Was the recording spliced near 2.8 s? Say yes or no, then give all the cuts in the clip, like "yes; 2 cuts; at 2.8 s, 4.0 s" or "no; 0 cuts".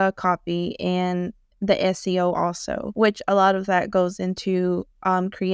yes; 1 cut; at 2.8 s